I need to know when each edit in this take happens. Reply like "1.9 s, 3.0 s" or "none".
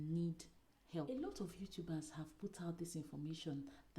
1.1 s